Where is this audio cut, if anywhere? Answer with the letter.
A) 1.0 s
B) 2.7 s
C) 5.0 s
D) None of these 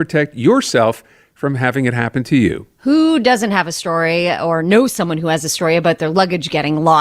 B